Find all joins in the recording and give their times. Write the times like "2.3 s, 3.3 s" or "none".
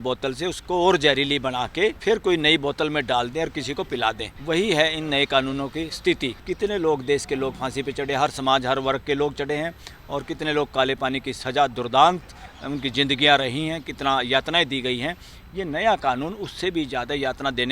2.0 s, 4.3 s, 6.4 s